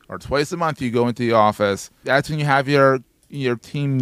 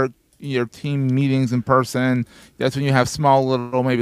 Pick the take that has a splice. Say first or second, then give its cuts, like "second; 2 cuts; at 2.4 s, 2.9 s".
first; 1 cut; at 2.0 s